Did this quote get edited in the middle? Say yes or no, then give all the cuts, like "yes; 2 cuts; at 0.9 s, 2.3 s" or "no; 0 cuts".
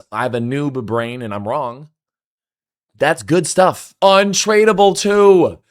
yes; 1 cut; at 3.9 s